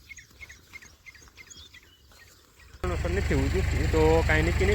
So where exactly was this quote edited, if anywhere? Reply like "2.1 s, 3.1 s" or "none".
2.8 s

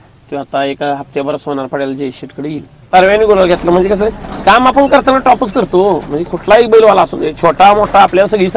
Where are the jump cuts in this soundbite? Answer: 2.7 s

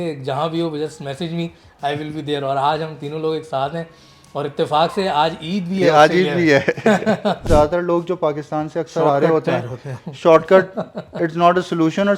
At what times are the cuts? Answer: 7.5 s

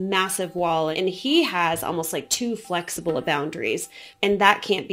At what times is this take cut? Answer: 0.9 s, 4.0 s

